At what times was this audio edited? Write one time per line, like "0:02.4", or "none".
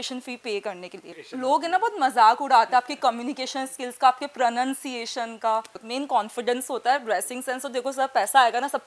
0:01.3
0:05.8